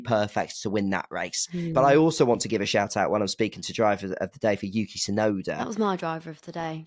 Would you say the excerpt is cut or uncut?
cut